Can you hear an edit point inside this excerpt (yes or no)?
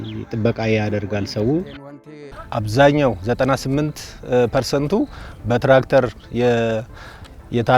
yes